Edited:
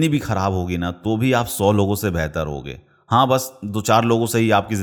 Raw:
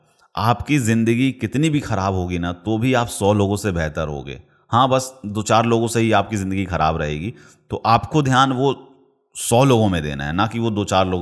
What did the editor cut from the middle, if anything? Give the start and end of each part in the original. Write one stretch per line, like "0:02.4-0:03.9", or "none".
none